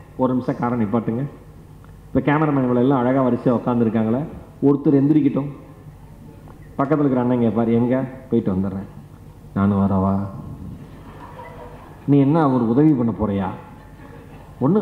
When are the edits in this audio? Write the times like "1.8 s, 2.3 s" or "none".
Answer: none